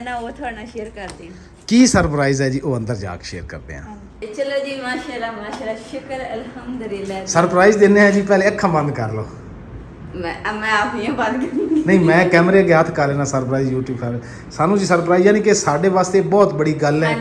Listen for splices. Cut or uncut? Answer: uncut